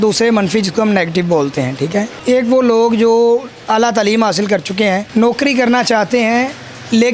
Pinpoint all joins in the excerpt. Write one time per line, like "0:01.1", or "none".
0:02.2
0:05.1